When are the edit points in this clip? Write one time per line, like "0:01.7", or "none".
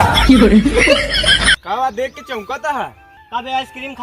0:03.1